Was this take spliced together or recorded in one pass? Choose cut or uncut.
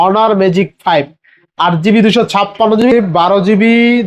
cut